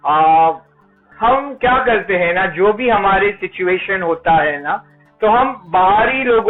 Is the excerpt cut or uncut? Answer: uncut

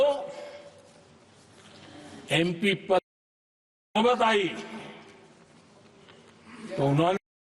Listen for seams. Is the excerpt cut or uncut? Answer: uncut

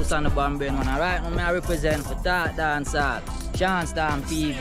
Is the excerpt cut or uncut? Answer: uncut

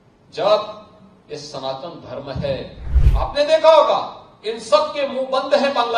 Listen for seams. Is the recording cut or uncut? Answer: cut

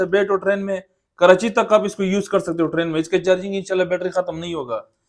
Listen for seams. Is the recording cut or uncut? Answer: uncut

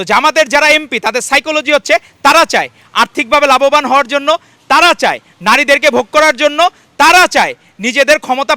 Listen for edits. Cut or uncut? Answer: uncut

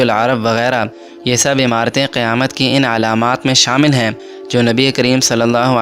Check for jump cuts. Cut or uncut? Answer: uncut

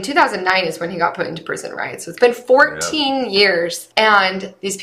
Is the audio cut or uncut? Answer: cut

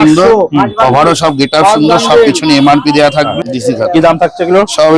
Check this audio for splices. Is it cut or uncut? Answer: cut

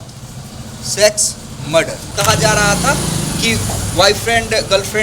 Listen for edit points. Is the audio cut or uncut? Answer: cut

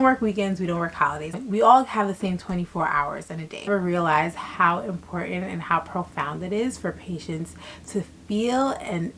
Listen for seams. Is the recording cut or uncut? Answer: cut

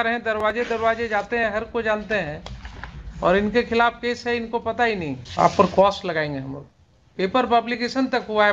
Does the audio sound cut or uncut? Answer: cut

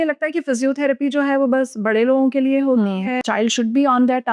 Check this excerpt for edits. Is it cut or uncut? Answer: cut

